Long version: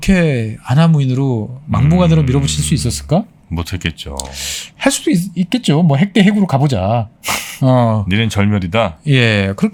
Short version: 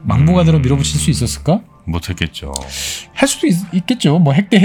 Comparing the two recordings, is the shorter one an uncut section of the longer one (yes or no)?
yes